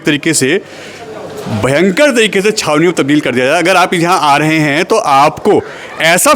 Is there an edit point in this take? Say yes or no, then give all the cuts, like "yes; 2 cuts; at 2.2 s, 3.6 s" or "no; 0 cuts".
no; 0 cuts